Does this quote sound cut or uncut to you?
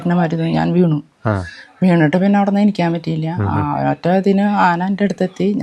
uncut